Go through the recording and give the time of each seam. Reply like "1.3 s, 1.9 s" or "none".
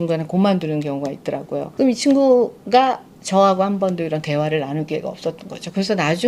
1.7 s